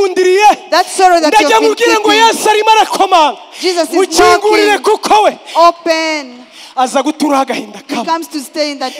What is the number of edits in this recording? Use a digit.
0